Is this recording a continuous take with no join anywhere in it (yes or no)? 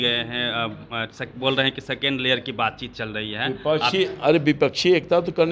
yes